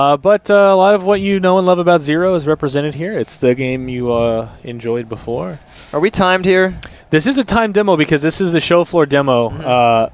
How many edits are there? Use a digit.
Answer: 1